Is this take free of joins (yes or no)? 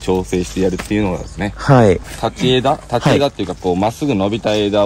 no